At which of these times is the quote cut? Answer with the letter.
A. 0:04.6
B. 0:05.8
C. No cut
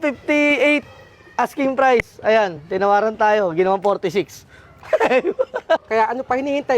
B